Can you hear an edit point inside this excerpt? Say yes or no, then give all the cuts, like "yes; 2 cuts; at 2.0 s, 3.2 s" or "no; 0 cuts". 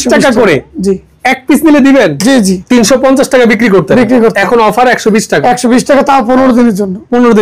yes; 1 cut; at 2.6 s